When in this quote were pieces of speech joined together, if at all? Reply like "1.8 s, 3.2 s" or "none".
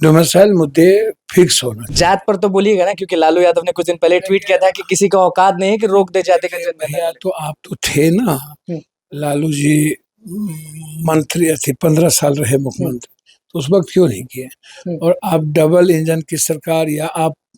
1.8 s